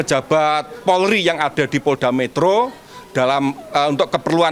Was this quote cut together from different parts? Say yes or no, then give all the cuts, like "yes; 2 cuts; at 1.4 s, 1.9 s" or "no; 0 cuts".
no; 0 cuts